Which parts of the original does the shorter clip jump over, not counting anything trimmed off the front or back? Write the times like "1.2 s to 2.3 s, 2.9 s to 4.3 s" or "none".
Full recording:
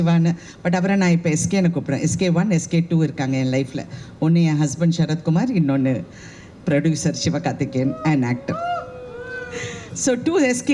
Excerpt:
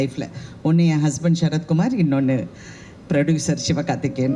none